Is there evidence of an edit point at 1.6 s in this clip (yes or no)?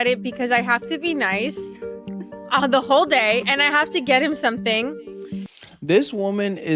no